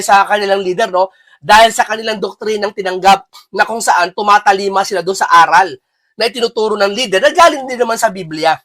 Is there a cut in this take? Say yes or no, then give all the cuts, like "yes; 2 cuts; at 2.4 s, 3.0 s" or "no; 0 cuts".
no; 0 cuts